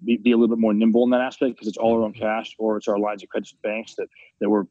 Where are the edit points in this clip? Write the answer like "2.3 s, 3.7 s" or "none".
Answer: none